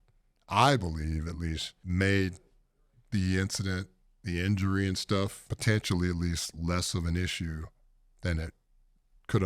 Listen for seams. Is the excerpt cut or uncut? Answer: cut